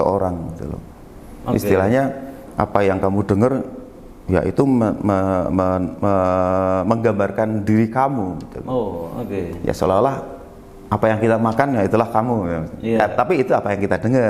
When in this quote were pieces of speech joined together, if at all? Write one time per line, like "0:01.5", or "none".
none